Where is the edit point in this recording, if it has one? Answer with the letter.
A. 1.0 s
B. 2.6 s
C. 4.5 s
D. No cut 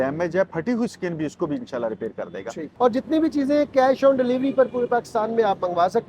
B